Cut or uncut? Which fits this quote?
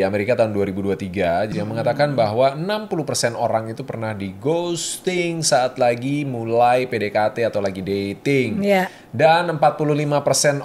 cut